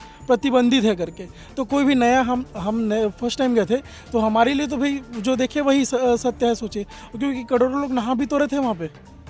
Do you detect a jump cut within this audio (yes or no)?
no